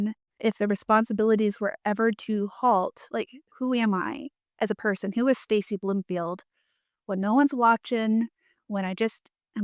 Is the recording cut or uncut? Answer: cut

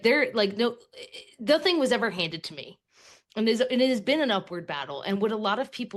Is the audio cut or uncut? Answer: uncut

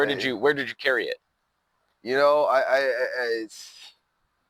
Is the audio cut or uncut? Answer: uncut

